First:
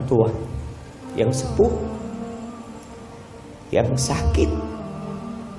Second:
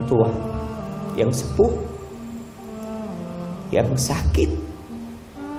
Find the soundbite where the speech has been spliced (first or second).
first